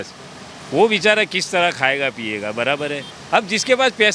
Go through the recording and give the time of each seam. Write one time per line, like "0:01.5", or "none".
none